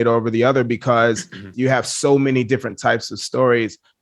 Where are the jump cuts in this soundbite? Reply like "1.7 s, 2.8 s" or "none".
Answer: 1.5 s

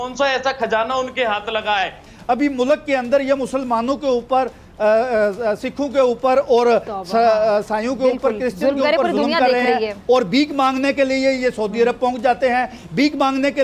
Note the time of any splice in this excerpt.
2.1 s

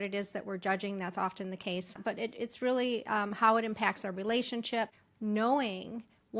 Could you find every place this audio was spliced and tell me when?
2.0 s, 5.0 s

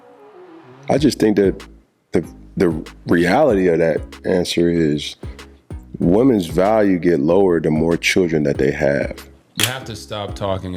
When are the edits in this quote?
9.7 s

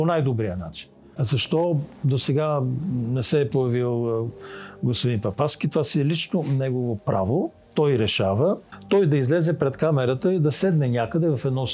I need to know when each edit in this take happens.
1.1 s, 8.7 s

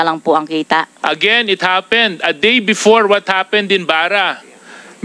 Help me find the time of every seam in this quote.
0.9 s

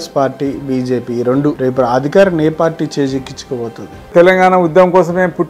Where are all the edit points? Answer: 1.6 s, 4.1 s

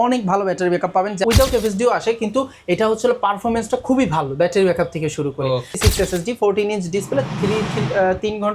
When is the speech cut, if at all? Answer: 1.2 s, 5.7 s

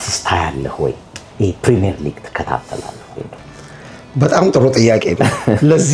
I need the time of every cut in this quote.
none

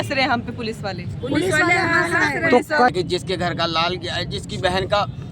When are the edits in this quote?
2.9 s

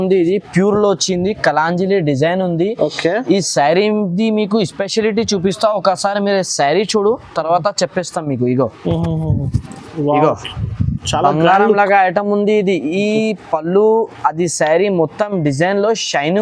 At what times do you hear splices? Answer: none

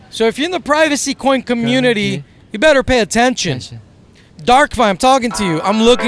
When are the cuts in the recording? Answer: none

